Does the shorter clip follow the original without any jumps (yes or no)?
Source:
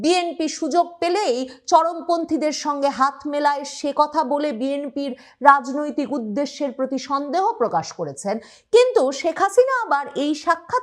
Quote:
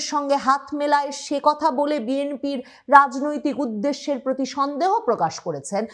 yes